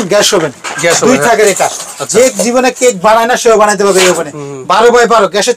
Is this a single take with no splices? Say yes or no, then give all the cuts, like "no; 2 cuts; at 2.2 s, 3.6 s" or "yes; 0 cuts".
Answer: yes; 0 cuts